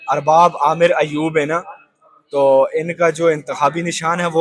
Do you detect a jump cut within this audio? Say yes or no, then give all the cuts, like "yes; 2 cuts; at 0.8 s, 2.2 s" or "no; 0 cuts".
no; 0 cuts